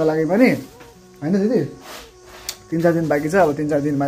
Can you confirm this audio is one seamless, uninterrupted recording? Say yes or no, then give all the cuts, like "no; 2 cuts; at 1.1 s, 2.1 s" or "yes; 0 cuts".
yes; 0 cuts